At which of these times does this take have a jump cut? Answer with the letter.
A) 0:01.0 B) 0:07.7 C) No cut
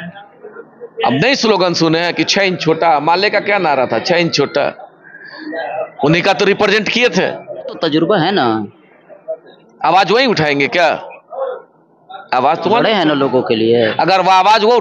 B